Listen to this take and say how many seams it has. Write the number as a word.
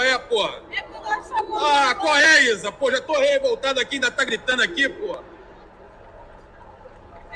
zero